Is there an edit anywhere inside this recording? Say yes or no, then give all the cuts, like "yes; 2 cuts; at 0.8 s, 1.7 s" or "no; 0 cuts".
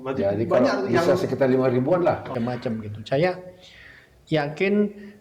yes; 1 cut; at 2.3 s